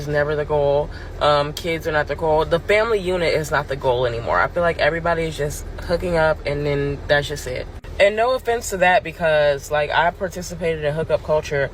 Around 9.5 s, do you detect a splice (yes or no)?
no